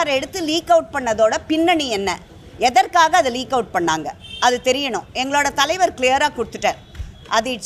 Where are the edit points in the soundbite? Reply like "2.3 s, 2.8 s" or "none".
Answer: none